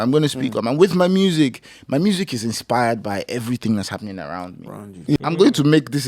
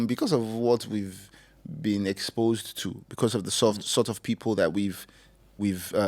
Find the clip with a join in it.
first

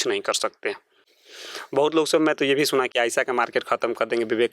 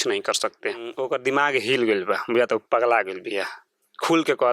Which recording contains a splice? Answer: second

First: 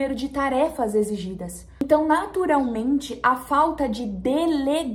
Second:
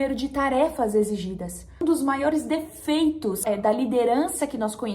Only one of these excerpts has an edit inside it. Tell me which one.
second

